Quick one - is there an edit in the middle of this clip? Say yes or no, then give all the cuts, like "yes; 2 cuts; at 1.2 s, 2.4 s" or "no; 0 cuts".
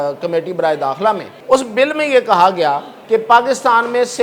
yes; 2 cuts; at 1.3 s, 2.9 s